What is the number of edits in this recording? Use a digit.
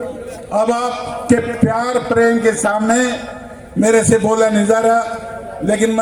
0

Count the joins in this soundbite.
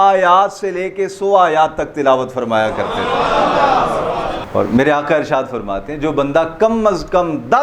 1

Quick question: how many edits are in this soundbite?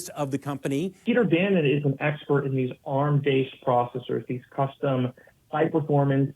1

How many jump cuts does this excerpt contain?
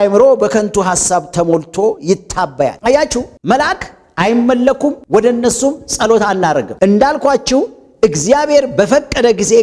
0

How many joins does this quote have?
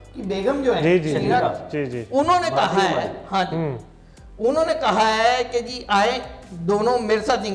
0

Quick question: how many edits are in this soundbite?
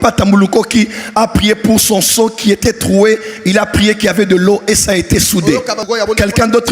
1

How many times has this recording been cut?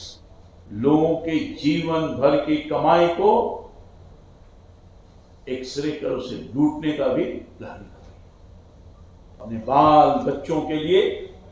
1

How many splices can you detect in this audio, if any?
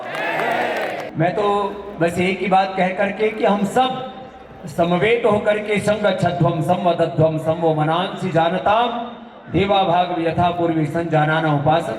1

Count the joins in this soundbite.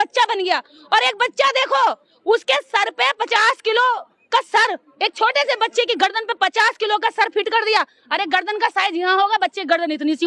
0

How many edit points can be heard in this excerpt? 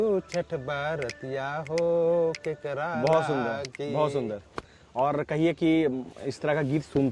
0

